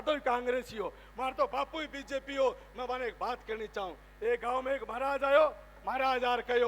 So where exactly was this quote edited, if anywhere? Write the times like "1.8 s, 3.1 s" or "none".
none